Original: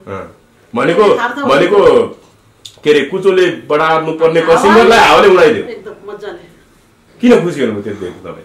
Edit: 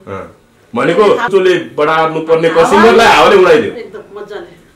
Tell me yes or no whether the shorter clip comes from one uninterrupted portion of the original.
no